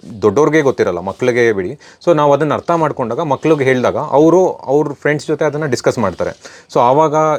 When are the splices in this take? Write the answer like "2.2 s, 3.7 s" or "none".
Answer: none